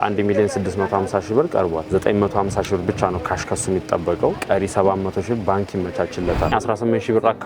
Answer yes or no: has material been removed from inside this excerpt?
yes